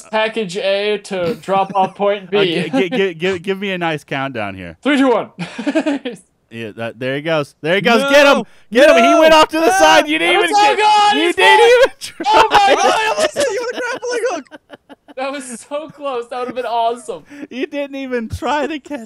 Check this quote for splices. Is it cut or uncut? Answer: cut